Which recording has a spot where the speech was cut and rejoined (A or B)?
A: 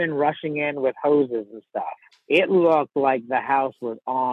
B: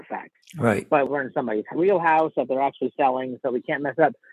B